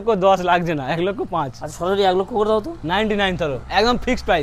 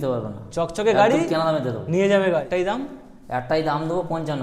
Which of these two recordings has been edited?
second; 1 cut; at 2.5 s

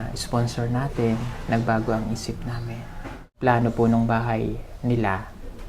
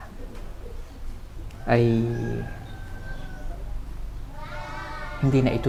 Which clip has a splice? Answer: first; 1 cut; at 3.3 s

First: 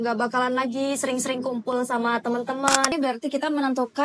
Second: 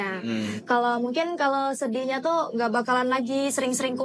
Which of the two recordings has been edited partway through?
first; 1 cut; at 2.9 s

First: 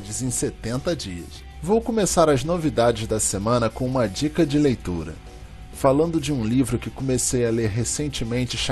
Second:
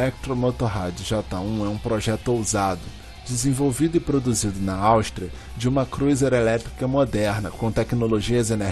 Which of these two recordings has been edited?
first; 1 cut; at 1.5 s

